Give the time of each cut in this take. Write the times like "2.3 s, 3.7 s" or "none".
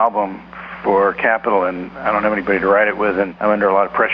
1.9 s, 3.3 s